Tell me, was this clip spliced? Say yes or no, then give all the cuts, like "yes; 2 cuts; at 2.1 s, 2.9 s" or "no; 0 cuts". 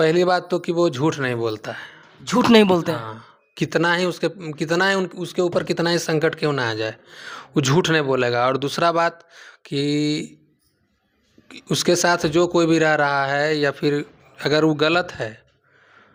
no; 0 cuts